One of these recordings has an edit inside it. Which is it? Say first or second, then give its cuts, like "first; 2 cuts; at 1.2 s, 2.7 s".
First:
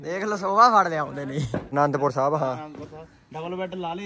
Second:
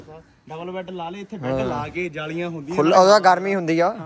first; 1 cut; at 1.7 s